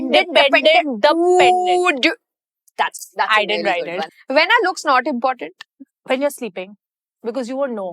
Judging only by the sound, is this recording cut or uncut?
cut